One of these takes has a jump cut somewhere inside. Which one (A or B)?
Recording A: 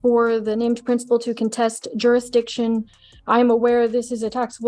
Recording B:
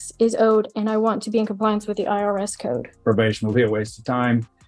B